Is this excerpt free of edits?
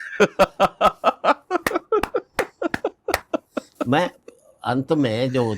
yes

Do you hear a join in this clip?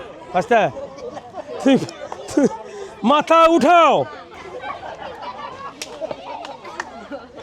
yes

